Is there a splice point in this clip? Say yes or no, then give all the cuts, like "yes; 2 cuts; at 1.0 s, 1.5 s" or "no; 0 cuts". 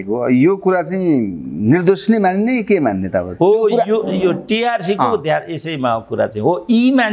no; 0 cuts